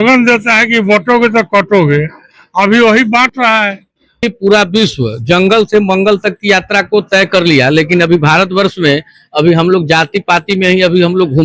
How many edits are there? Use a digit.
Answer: 1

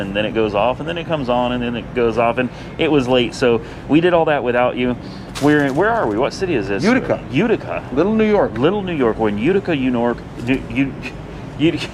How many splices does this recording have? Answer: 0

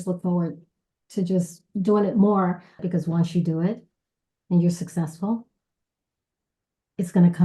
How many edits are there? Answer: 1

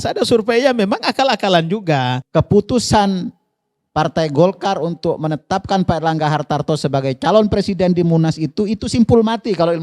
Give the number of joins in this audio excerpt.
1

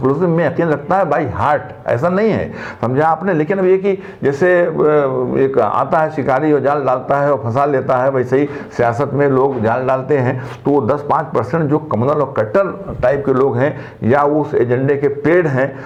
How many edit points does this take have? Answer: 0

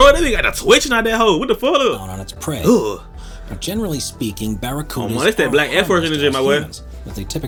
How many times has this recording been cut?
0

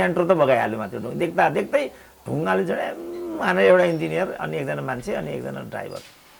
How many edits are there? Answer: 0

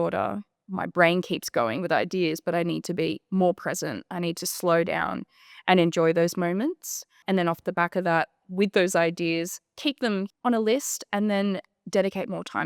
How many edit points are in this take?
2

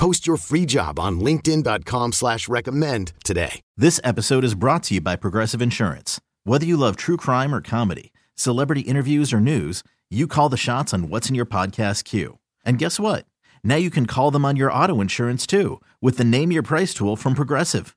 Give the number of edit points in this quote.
1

